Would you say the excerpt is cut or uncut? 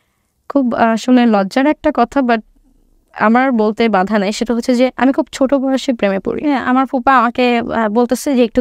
cut